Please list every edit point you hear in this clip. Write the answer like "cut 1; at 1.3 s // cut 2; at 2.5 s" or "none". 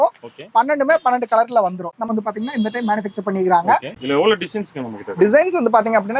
cut 1; at 2.1 s